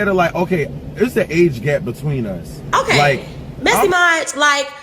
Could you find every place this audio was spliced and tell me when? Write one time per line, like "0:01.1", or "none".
0:03.8